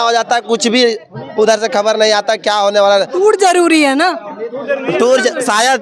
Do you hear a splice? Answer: no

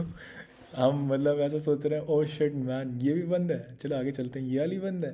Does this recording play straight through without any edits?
yes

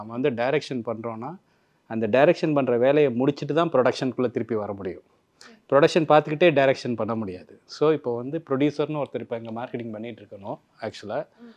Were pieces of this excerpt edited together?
no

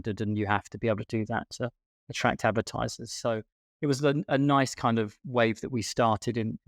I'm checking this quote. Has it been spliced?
no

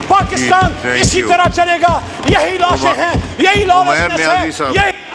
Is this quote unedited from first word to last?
yes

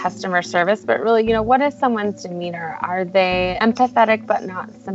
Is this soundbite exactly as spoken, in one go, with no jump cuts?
yes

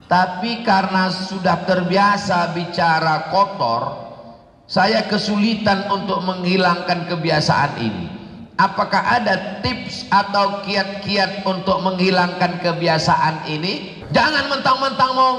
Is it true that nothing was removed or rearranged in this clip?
no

